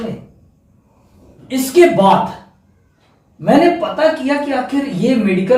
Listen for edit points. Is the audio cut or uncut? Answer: cut